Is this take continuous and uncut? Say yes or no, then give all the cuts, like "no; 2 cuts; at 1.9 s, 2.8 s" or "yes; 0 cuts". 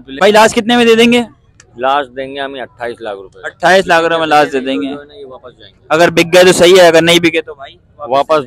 yes; 0 cuts